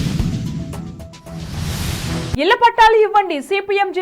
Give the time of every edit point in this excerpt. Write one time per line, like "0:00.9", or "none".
0:02.3